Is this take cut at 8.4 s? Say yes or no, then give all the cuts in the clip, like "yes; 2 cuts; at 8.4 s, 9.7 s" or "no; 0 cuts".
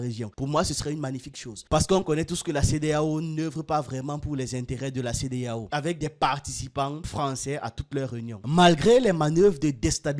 yes; 2 cuts; at 5.7 s, 8.4 s